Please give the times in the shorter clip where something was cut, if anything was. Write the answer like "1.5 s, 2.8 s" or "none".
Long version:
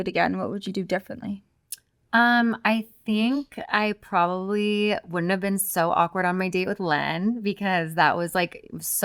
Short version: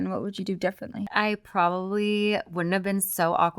1.0 s